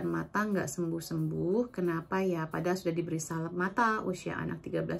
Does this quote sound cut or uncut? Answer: uncut